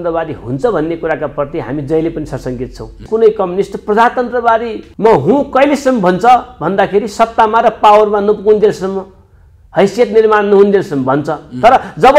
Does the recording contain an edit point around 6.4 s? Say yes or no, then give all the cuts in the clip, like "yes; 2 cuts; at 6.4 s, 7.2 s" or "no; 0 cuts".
no; 2 cuts; at 3.0 s, 4.8 s